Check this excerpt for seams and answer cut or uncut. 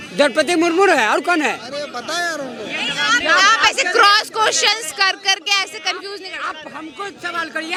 uncut